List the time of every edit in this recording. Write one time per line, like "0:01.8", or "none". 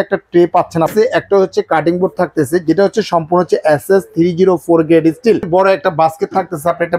0:00.9
0:05.5

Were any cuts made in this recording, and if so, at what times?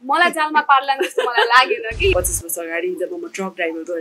0:02.1

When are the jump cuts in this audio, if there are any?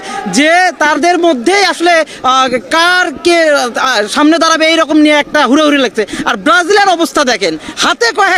none

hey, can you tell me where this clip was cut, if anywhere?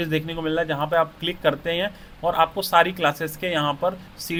none

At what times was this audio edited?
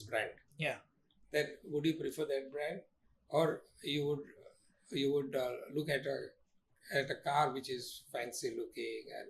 none

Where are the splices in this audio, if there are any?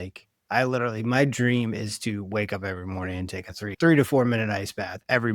0:03.7

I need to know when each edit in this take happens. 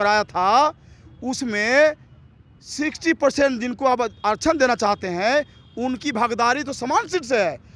none

